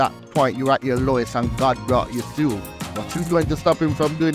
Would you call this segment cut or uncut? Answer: uncut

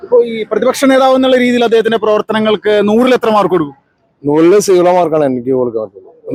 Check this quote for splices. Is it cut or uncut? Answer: uncut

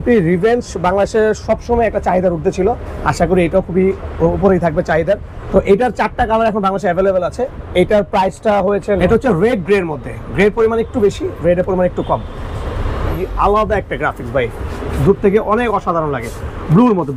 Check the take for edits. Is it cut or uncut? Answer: cut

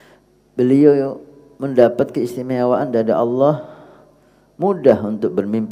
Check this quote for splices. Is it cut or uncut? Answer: uncut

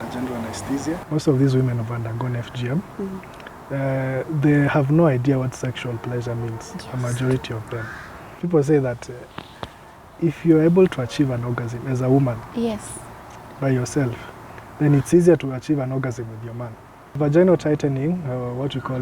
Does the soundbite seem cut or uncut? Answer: cut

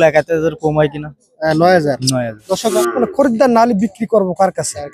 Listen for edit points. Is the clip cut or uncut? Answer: cut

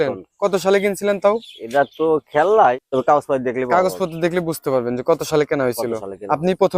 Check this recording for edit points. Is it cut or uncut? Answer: cut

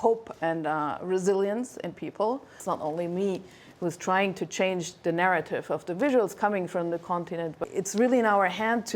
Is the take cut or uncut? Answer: cut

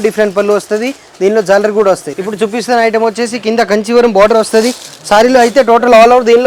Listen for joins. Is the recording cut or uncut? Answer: cut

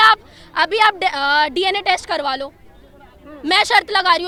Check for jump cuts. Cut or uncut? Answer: uncut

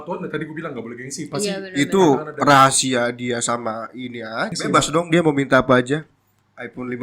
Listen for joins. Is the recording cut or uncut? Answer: cut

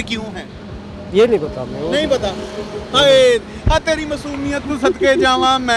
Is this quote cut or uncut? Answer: uncut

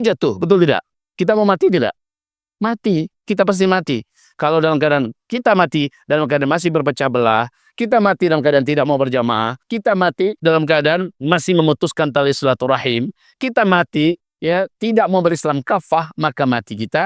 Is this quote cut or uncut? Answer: uncut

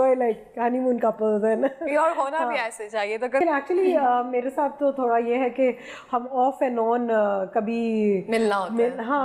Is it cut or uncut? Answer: uncut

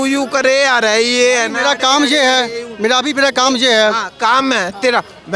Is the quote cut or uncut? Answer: uncut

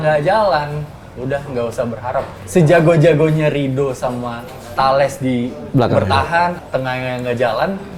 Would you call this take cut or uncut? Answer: cut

